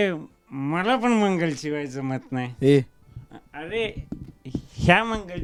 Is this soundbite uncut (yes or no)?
yes